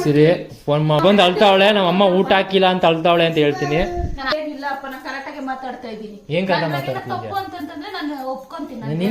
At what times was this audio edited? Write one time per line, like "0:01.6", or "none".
0:01.0
0:04.3